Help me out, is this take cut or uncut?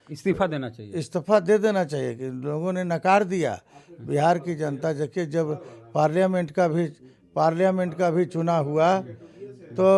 uncut